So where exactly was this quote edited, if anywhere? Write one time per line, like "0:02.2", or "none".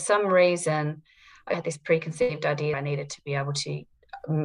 0:01.5
0:02.7